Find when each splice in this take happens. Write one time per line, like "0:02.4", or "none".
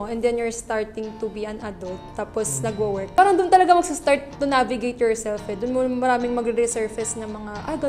none